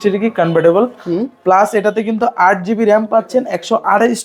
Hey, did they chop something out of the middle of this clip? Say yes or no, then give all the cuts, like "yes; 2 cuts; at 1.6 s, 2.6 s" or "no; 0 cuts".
no; 0 cuts